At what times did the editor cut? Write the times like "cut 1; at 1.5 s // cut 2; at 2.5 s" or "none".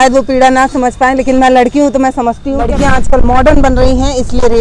cut 1; at 2.6 s